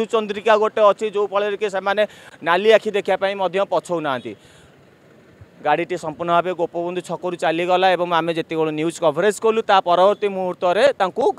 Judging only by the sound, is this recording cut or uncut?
uncut